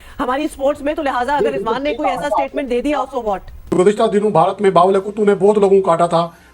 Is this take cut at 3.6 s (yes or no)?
yes